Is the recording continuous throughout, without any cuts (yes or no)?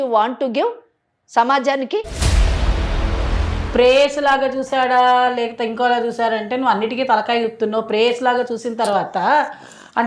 no